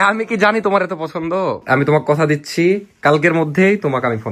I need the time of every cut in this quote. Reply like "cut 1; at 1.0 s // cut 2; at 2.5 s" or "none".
cut 1; at 1.6 s